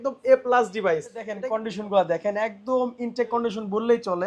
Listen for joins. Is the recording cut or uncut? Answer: cut